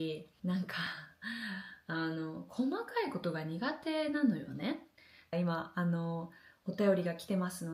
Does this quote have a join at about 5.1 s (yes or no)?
yes